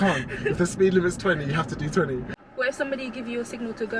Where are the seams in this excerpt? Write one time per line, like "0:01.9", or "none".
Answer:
0:02.4